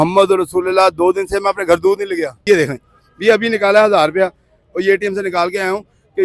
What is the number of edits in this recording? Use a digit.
1